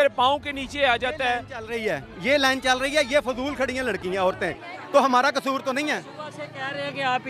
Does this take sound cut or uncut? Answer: uncut